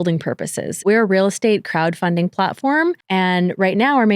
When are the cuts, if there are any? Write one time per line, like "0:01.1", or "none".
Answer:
0:00.8
0:03.0

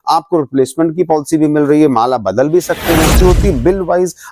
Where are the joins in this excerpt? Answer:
0:03.1

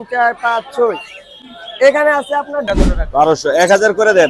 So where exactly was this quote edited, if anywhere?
0:02.7

